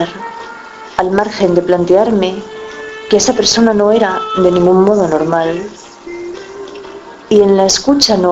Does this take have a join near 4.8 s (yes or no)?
no